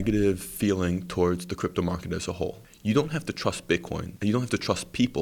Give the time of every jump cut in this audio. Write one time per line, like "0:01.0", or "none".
0:02.7
0:04.0